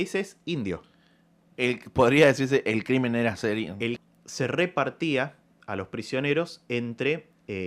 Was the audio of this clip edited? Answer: yes; 1 cut; at 4.0 s

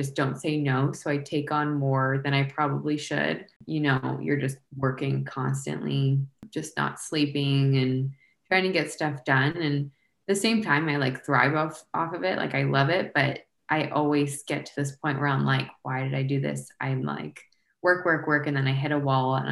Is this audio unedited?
no; 2 cuts; at 3.6 s, 6.5 s

